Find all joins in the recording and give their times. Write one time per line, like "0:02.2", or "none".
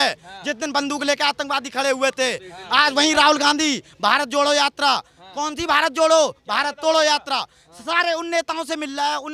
none